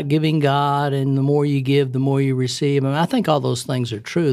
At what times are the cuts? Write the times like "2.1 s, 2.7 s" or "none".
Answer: none